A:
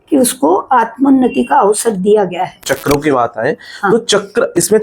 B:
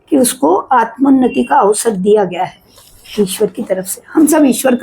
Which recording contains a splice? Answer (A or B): A